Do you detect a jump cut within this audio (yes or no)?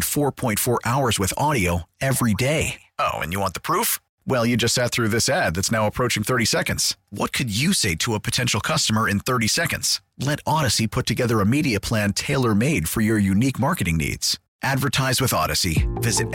no